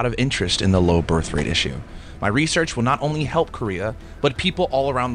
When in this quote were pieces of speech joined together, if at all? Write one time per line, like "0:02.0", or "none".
none

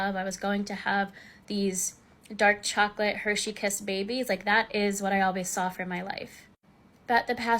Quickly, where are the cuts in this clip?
0:04.0

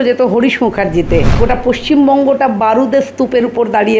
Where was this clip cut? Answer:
0:01.3

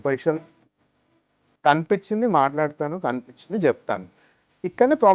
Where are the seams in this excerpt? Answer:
0:01.1

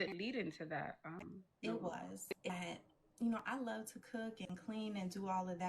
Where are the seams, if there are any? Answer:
0:02.5

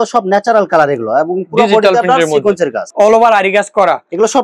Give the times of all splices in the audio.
0:02.8

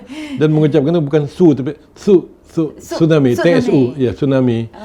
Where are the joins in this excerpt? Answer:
none

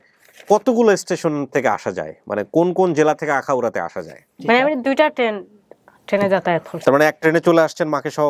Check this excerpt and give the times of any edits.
0:04.3
0:06.7

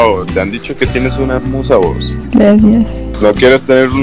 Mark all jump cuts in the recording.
0:02.1
0:03.0

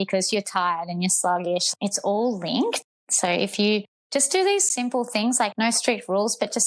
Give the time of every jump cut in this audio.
none

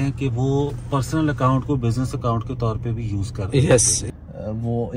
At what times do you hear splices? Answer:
0:04.0

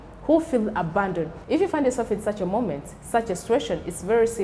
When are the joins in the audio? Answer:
0:01.4

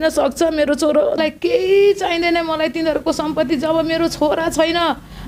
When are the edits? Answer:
0:01.2

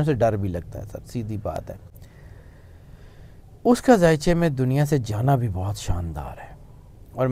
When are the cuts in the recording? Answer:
none

